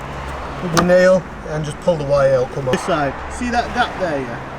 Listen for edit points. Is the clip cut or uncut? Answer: cut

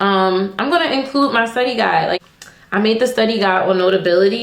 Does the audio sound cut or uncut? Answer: cut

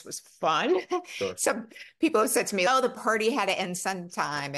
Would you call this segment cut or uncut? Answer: cut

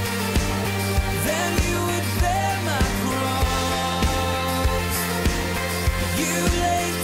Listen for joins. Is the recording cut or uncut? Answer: uncut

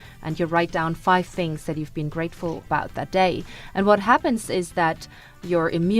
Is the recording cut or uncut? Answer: cut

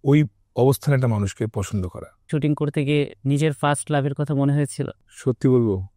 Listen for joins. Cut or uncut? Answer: cut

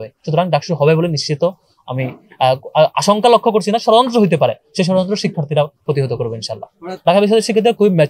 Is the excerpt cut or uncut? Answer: cut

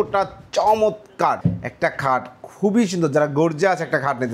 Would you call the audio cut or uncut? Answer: cut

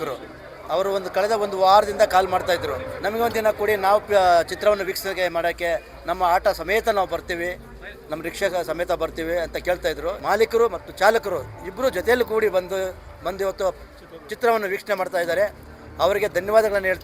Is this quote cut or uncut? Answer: cut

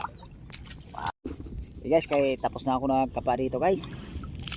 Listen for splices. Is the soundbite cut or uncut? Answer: cut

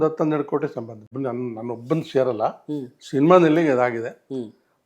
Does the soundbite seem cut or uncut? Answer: cut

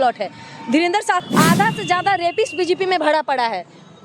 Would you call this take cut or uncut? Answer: cut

